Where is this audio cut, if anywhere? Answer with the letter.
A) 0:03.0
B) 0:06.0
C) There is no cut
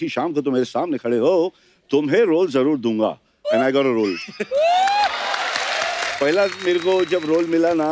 B